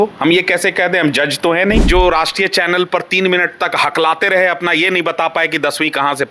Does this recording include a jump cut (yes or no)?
yes